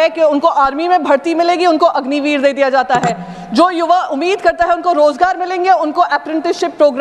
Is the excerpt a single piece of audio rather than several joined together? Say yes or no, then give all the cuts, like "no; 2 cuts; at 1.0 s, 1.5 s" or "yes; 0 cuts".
yes; 0 cuts